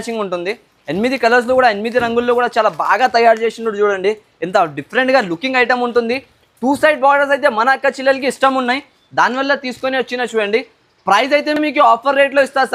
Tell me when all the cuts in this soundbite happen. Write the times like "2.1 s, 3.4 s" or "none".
none